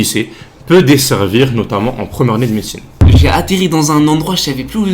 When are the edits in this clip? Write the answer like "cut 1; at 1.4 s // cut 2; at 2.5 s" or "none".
cut 1; at 3.0 s